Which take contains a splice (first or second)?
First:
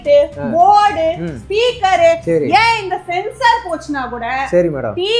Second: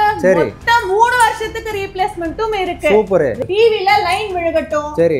second